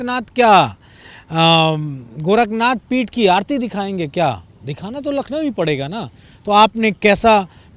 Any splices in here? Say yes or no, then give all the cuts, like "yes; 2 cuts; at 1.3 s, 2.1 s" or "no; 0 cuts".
no; 0 cuts